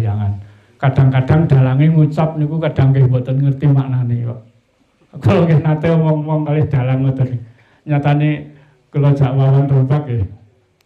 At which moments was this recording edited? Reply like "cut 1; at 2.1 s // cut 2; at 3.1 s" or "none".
none